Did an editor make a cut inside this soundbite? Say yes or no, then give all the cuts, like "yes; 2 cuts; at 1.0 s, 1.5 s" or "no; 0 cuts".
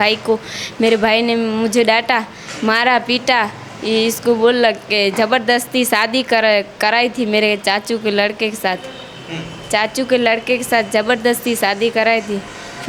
no; 0 cuts